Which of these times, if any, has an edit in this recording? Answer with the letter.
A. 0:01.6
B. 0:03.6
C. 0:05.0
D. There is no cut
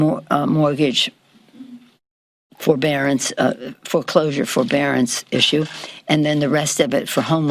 D